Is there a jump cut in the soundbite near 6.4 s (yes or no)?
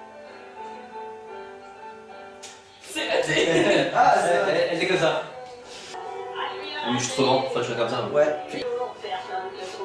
no